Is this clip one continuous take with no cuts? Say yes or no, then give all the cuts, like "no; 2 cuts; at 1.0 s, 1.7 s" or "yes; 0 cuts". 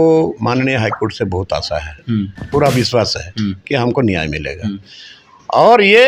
yes; 0 cuts